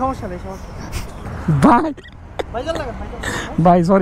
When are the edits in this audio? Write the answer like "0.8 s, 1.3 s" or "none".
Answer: 1.3 s